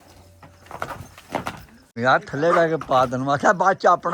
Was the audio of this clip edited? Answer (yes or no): yes